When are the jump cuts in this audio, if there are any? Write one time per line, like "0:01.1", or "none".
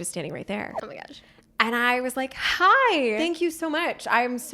0:03.2